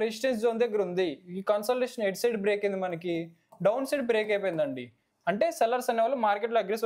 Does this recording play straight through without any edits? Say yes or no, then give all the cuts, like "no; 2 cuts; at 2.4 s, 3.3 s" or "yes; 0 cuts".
yes; 0 cuts